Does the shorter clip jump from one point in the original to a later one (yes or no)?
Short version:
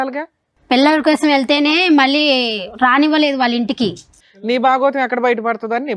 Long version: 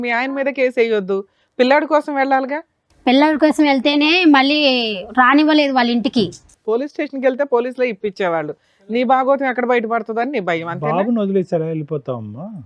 yes